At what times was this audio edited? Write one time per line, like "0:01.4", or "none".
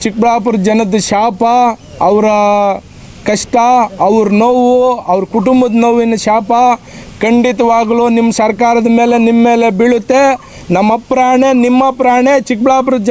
none